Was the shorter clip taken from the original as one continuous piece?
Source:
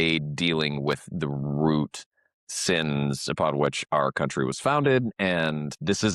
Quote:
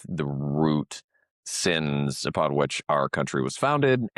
yes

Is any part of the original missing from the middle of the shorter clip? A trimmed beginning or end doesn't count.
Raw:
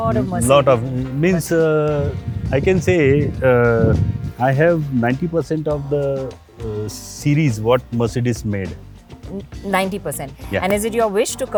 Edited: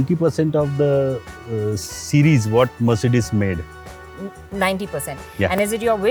no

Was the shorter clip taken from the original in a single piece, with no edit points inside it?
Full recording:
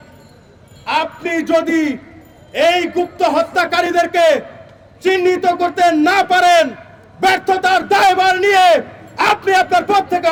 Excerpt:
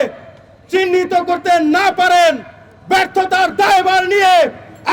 yes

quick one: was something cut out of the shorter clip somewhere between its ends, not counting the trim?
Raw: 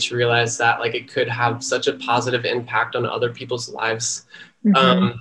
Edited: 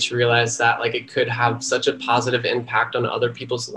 no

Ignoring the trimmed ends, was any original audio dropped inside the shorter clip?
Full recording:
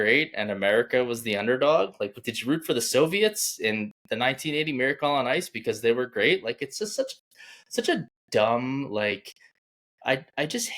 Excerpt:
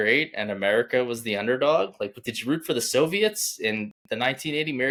no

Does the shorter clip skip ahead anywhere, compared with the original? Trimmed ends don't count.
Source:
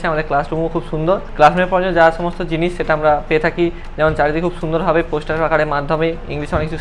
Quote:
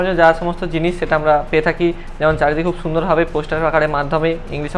no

